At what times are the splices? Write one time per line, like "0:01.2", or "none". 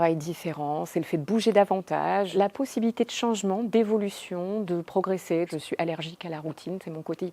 0:02.3
0:05.5